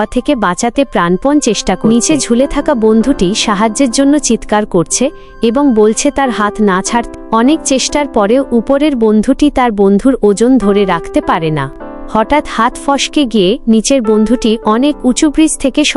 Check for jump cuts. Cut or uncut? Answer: uncut